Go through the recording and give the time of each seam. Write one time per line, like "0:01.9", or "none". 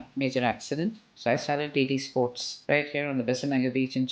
0:01.1
0:02.5